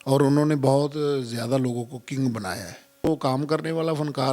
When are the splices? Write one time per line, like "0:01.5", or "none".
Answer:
0:03.1